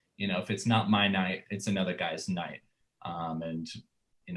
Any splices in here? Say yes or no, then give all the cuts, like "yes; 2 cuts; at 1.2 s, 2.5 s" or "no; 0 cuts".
no; 0 cuts